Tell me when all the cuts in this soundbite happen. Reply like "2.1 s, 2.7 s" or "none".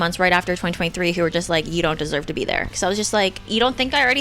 2.7 s, 3.4 s